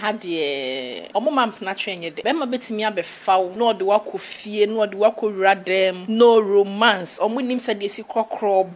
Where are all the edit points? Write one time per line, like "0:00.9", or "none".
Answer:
0:01.0
0:02.2
0:03.5
0:06.0